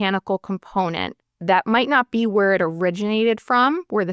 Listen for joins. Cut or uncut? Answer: uncut